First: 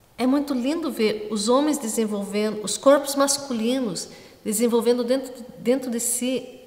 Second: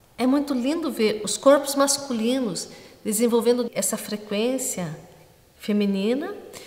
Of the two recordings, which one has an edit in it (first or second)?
second